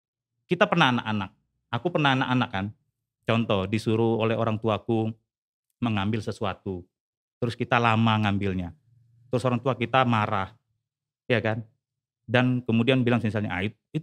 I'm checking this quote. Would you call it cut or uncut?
uncut